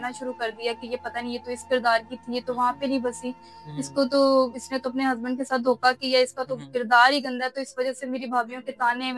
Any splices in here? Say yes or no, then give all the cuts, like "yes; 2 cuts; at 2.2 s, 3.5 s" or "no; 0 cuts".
no; 0 cuts